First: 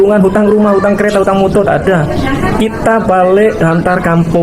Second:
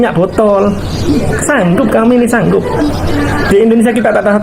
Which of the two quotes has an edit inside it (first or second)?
second